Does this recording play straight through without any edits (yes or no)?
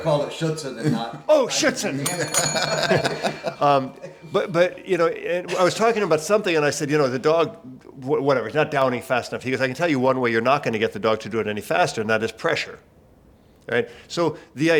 yes